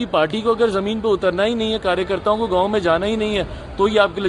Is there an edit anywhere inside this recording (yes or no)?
no